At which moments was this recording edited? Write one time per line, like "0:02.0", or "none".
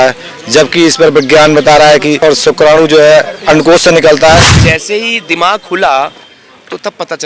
0:02.2
0:04.5